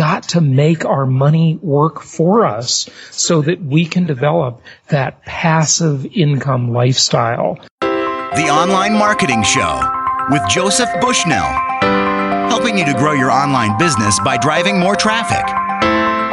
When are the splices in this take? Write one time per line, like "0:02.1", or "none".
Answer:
0:07.7